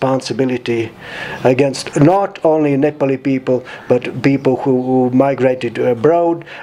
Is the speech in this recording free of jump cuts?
yes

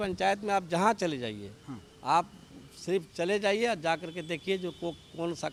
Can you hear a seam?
no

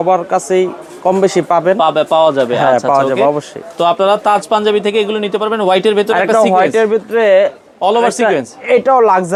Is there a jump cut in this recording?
no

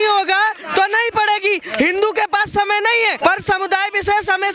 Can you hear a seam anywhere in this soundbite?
no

